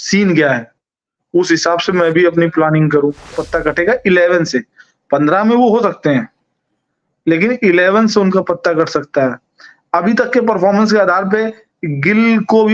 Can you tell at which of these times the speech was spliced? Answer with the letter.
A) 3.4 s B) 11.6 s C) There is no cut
A